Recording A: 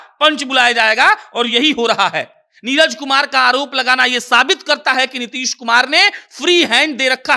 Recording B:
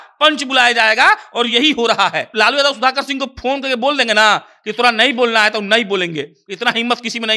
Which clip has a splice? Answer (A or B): B